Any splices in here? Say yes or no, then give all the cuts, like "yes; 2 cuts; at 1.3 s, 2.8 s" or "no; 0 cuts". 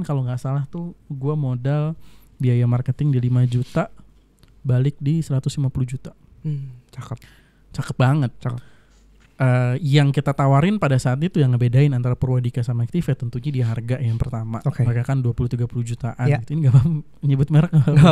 no; 0 cuts